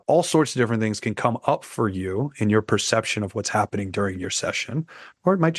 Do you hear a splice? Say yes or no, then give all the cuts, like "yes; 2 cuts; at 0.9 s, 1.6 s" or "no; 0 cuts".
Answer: no; 0 cuts